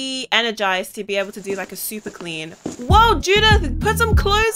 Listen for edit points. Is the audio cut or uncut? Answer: uncut